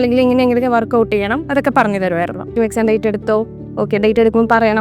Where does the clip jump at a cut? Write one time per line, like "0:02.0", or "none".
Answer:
0:02.5